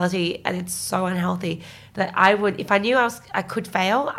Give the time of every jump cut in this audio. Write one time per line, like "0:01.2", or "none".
none